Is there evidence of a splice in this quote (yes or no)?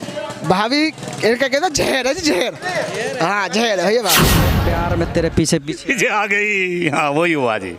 yes